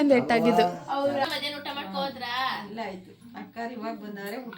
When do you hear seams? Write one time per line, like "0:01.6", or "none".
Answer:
0:01.3